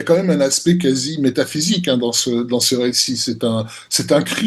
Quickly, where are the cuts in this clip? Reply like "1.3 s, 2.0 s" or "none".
none